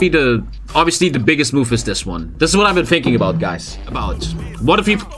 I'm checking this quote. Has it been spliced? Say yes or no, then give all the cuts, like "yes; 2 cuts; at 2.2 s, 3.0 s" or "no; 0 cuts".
yes; 1 cut; at 4.1 s